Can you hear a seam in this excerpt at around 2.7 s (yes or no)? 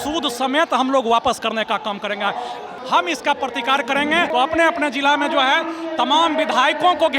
yes